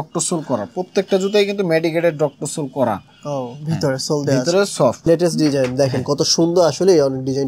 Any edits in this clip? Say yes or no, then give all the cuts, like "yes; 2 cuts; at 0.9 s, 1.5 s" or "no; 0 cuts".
yes; 1 cut; at 5.0 s